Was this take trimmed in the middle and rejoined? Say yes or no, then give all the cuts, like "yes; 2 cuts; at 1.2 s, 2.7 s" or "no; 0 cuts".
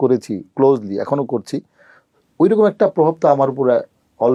no; 0 cuts